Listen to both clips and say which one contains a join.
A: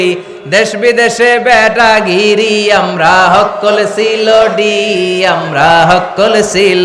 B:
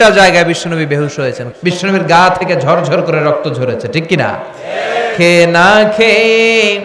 B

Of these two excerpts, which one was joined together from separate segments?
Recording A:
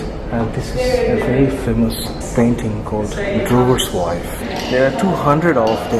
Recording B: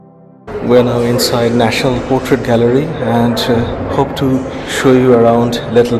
A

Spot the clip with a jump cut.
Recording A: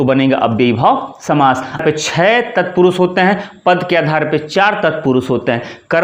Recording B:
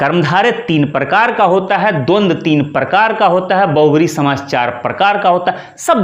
A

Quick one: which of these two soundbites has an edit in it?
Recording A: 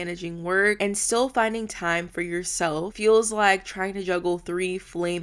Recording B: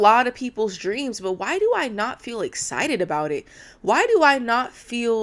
A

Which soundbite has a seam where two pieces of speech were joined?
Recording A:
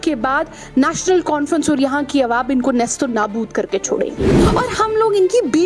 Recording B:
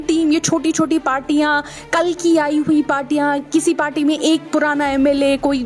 A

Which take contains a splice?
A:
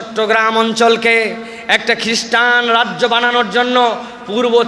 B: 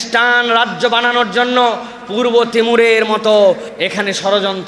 B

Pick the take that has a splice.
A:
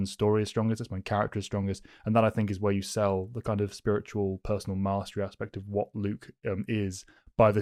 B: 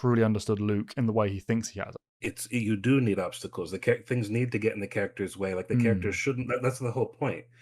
B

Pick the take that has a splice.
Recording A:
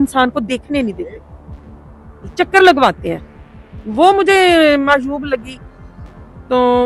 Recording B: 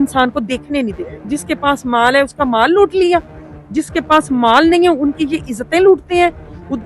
B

